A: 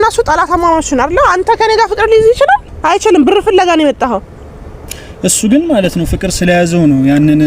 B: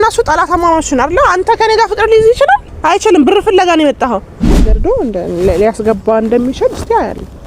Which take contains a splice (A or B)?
B